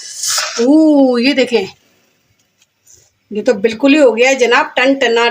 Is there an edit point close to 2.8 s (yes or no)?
no